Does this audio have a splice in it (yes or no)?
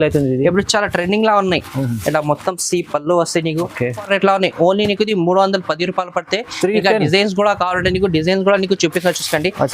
yes